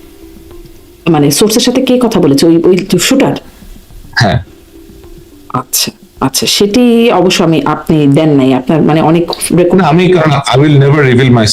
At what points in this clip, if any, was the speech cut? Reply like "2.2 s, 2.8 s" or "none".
none